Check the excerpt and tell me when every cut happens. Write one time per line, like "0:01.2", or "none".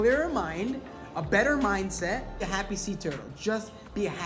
0:02.5